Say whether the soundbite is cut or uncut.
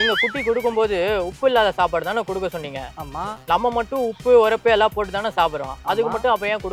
uncut